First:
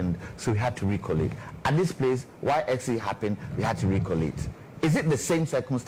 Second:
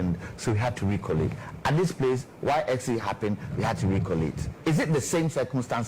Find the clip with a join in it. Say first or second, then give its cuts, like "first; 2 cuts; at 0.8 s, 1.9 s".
second; 1 cut; at 4.5 s